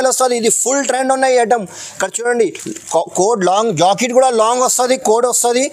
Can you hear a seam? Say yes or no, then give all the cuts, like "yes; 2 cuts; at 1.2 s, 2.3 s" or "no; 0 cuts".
no; 0 cuts